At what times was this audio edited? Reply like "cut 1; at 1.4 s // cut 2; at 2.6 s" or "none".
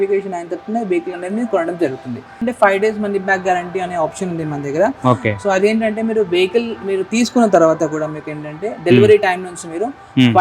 cut 1; at 2.3 s